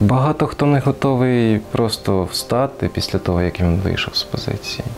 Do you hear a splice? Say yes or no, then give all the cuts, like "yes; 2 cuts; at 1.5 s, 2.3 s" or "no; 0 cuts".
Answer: no; 0 cuts